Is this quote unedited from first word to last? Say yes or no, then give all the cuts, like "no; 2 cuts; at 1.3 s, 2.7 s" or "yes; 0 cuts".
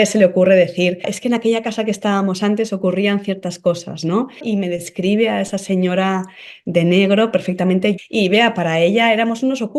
no; 3 cuts; at 1.1 s, 4.4 s, 8.0 s